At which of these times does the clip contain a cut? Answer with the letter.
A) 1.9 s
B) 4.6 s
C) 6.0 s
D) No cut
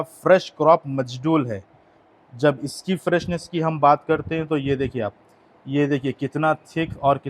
D